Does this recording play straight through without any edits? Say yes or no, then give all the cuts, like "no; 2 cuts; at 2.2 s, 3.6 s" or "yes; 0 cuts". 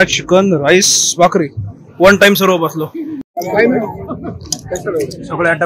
no; 1 cut; at 3.3 s